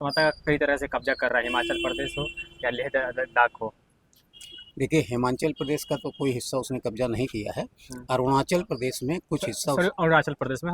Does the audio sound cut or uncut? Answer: uncut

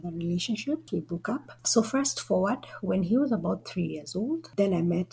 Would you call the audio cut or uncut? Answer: cut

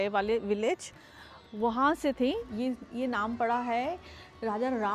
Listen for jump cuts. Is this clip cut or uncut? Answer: cut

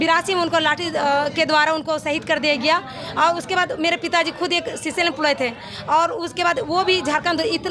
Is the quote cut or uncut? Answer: uncut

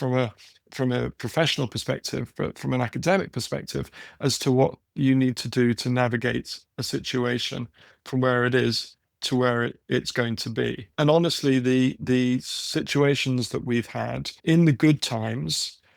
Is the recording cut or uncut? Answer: cut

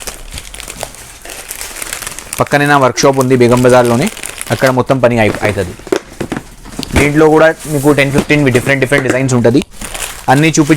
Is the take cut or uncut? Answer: uncut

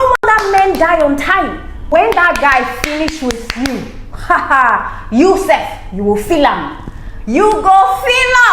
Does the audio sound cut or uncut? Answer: cut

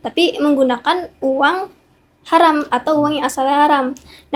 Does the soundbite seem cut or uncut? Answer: uncut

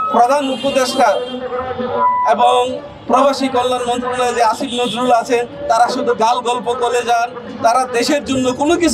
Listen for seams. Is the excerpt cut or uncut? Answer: uncut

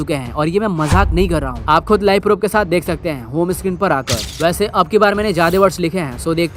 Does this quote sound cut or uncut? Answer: cut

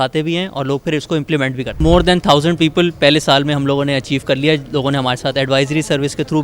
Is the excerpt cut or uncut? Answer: cut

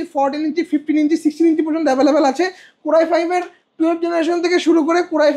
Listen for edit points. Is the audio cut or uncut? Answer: uncut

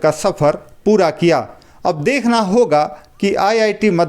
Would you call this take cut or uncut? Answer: uncut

